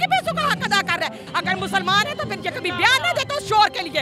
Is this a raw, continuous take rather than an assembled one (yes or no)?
no